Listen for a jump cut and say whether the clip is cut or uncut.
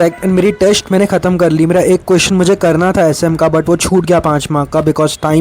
uncut